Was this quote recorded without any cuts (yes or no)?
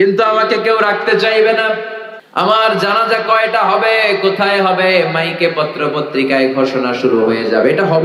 yes